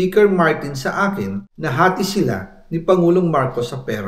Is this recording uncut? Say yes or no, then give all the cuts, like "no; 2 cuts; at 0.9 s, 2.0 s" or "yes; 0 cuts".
no; 1 cut; at 1.5 s